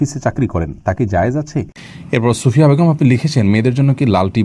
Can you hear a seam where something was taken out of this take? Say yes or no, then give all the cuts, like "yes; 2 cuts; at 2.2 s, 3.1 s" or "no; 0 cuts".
yes; 1 cut; at 1.8 s